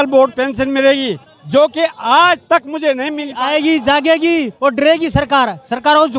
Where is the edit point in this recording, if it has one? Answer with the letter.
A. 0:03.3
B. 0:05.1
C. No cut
A